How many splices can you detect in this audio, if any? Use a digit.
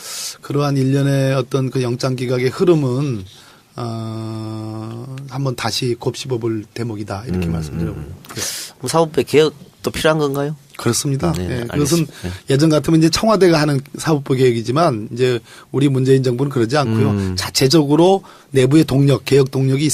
1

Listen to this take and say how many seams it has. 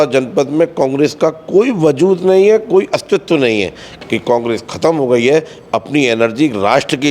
1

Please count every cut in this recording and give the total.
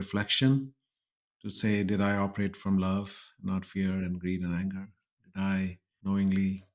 1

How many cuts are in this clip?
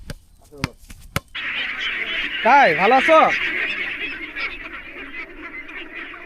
1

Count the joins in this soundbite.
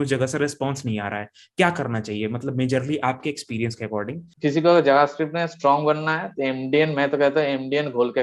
1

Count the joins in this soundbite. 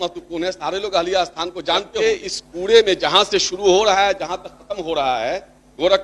1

